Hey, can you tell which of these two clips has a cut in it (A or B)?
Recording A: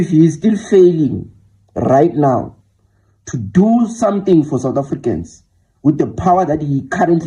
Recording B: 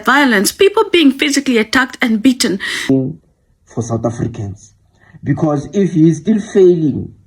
B